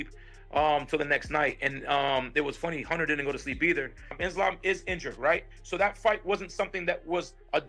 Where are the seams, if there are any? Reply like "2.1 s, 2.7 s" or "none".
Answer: 4.2 s

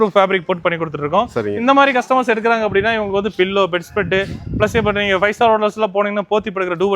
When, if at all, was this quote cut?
none

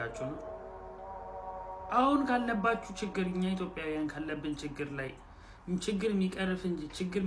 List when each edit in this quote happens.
none

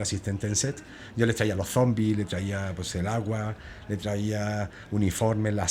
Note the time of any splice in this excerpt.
none

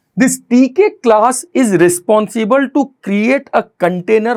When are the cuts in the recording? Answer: none

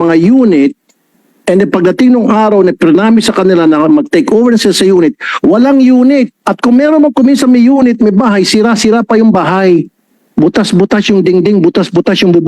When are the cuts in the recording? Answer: 6.4 s

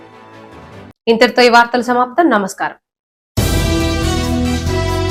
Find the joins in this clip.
none

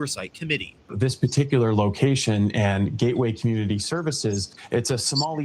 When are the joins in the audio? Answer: 0.9 s, 4.5 s

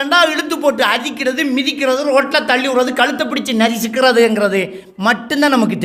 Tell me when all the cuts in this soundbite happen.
none

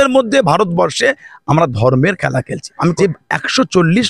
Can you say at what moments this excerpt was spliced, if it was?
2.9 s

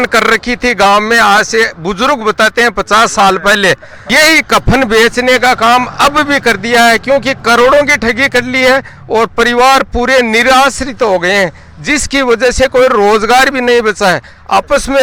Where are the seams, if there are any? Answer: none

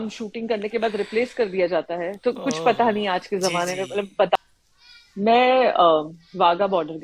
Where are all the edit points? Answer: 4.4 s

